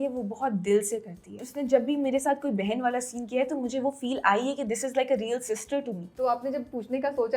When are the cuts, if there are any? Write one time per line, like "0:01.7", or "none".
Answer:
0:01.5
0:06.1